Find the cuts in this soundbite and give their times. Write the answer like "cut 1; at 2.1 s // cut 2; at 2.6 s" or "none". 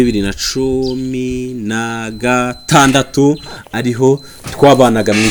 none